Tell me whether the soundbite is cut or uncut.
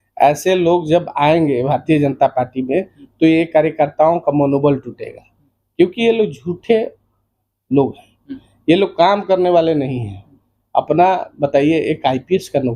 uncut